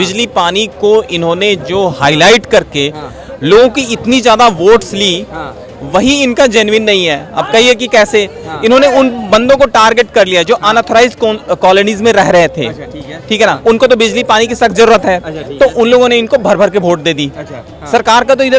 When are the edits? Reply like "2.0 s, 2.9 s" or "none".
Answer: none